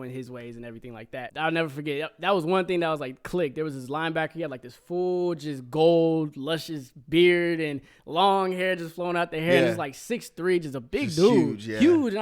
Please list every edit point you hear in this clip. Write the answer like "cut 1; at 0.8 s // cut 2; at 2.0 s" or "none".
cut 1; at 1.3 s